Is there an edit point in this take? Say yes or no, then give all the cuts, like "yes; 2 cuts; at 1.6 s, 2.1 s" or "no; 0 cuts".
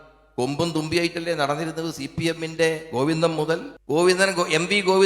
yes; 1 cut; at 3.7 s